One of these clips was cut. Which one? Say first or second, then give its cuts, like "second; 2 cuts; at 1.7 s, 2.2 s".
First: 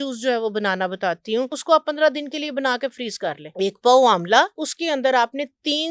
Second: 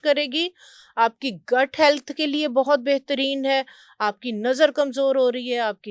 first; 3 cuts; at 1.6 s, 3.4 s, 4.7 s